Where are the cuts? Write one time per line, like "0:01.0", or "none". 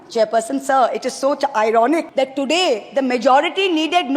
0:02.1